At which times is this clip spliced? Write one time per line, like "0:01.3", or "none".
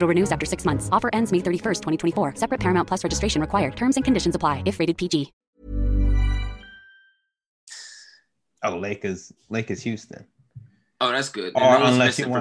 none